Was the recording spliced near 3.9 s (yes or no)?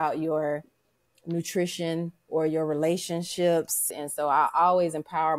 yes